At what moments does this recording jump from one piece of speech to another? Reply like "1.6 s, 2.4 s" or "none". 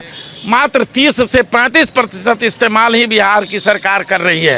none